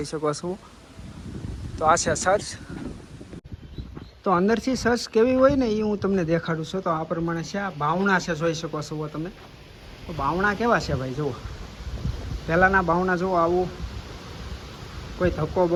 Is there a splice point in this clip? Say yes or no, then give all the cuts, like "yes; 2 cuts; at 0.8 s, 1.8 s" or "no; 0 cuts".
no; 0 cuts